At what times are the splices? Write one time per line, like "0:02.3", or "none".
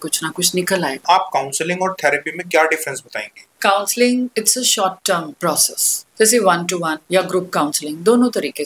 0:01.0
0:03.6
0:04.3
0:05.4
0:07.0